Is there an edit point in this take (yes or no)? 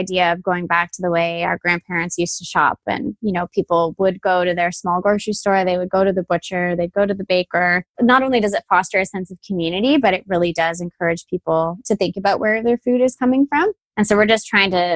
no